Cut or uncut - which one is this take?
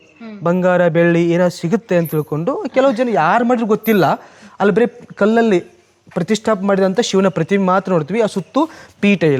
uncut